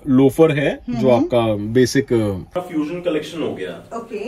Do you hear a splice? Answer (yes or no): yes